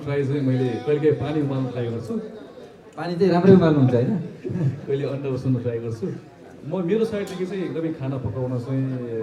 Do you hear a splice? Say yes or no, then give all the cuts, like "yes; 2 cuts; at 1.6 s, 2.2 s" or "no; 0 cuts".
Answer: no; 0 cuts